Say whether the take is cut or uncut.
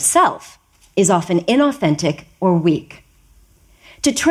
uncut